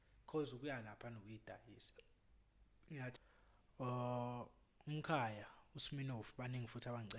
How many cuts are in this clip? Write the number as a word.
one